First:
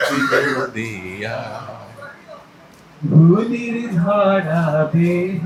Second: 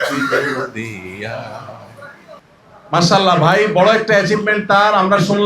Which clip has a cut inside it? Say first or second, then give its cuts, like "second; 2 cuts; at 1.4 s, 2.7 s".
second; 1 cut; at 2.5 s